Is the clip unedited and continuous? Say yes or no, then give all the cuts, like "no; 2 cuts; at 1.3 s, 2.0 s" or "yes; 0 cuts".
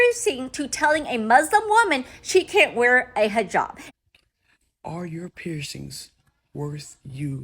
no; 1 cut; at 3.8 s